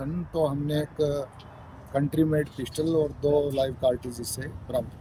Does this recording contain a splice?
no; 0 cuts

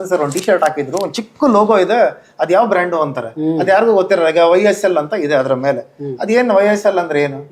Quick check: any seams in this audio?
no; 0 cuts

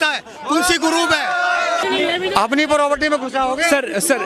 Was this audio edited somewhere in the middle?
yes; 1 cut; at 1.8 s

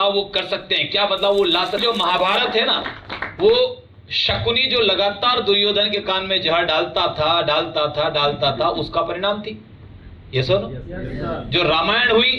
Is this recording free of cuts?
no; 1 cut; at 1.8 s

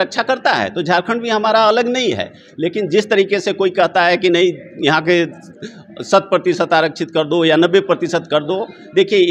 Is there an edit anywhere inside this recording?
no; 0 cuts

